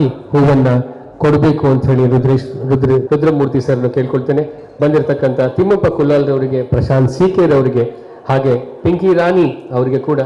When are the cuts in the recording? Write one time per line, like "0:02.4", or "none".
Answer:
0:03.0

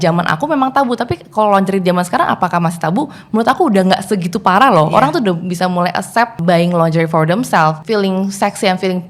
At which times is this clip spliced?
0:06.4
0:07.8

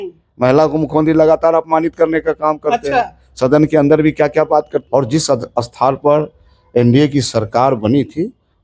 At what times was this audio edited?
0:04.8

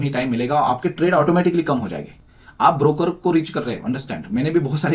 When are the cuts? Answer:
none

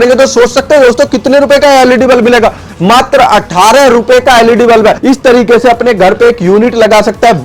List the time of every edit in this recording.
0:05.0

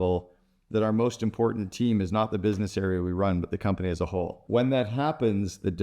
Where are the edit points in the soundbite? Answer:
0:04.4

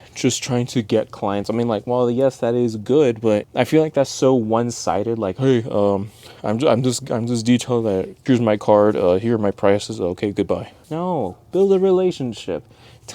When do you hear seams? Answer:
0:03.5
0:08.1
0:10.8

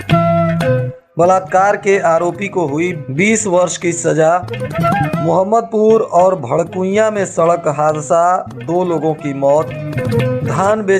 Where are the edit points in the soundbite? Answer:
0:01.0

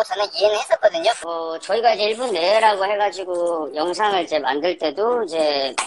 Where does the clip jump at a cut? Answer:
0:01.2

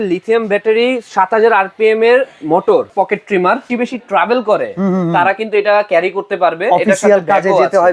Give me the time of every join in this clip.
0:02.9
0:03.7

